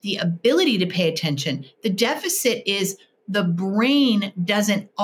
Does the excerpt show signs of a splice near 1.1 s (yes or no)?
no